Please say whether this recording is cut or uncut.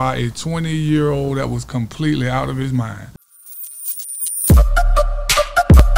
cut